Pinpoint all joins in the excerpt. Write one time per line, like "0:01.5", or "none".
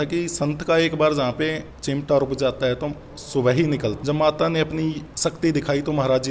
0:04.1